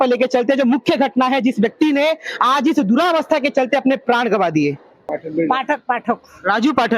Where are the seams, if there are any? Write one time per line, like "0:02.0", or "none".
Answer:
0:05.2